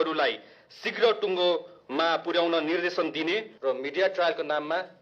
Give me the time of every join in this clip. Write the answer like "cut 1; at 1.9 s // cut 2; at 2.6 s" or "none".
cut 1; at 3.5 s